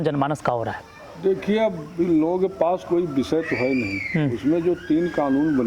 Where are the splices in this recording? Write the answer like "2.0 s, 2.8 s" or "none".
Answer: none